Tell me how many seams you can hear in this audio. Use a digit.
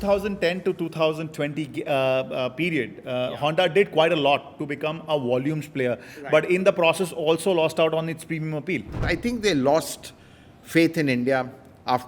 1